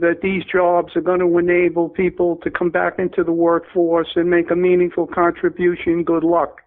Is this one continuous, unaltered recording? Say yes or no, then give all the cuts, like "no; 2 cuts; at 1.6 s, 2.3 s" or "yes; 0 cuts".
no; 1 cut; at 2.4 s